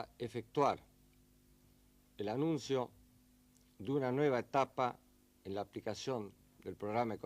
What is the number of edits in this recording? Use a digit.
1